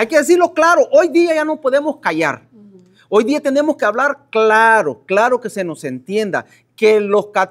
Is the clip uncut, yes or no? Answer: yes